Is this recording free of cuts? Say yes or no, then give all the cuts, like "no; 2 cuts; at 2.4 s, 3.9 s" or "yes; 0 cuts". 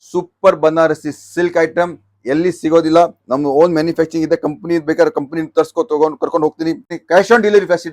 no; 1 cut; at 6.9 s